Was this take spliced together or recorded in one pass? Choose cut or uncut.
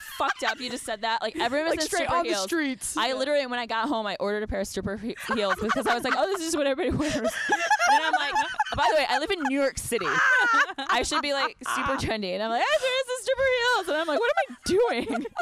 uncut